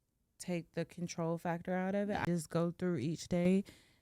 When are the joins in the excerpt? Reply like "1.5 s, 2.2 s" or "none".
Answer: 2.2 s